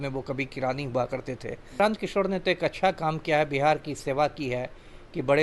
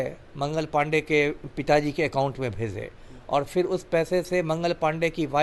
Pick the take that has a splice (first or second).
first